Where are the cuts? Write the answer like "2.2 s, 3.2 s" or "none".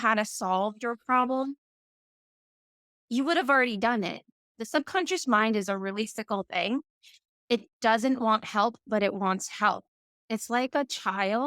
4.5 s